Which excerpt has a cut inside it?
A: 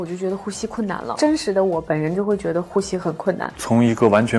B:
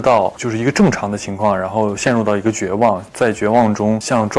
A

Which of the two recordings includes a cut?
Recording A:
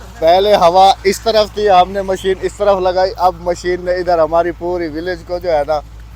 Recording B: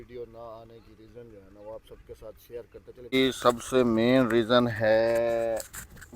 B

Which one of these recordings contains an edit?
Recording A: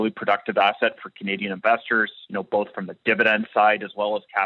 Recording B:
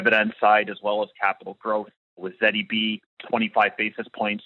B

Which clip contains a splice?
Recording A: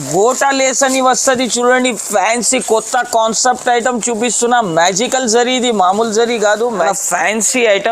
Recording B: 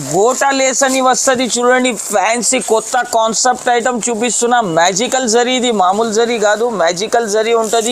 A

